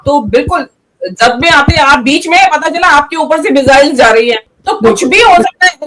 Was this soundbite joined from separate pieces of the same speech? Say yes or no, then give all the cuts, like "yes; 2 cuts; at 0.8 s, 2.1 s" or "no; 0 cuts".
yes; 1 cut; at 4.5 s